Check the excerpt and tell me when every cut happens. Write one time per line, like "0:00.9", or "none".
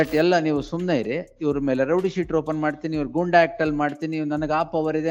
none